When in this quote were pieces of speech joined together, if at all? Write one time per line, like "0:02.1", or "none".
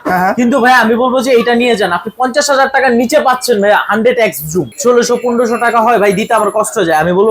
0:04.7